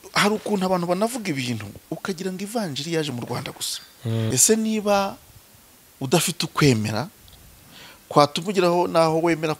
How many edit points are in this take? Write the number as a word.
one